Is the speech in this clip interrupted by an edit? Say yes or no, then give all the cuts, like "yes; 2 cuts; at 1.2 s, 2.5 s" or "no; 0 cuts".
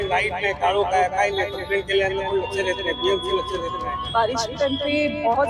yes; 1 cut; at 4.0 s